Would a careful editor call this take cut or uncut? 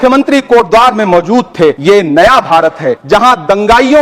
cut